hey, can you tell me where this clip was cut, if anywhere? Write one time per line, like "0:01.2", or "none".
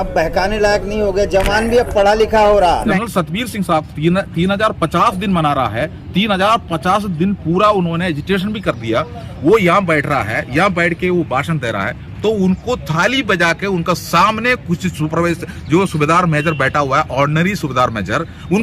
0:03.0